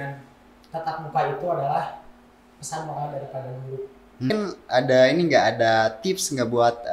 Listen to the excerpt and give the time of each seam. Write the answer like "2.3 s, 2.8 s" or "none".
4.3 s

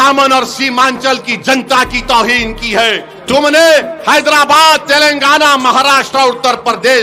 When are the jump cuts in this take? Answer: 3.1 s

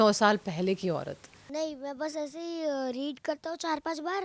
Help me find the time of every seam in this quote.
1.4 s

